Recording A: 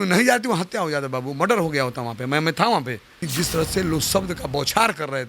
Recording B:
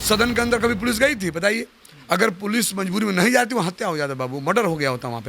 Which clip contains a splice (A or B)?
A